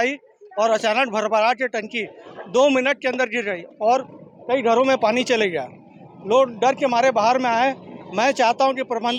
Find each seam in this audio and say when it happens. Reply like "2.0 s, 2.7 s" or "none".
none